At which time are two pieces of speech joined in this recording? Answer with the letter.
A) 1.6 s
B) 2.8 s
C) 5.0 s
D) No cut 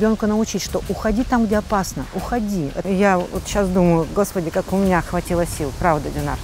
B